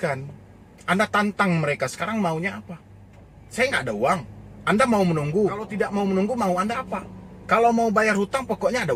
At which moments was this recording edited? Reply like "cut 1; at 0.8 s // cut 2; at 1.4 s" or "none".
none